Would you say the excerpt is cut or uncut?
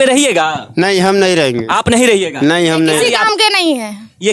cut